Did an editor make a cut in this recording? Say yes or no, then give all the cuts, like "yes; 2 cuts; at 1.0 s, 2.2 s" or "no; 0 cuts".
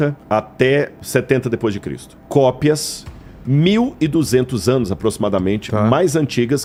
no; 0 cuts